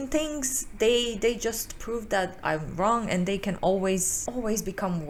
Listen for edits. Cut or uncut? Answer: uncut